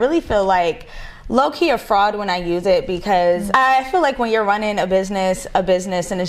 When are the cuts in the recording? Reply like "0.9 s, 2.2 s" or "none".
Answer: 3.5 s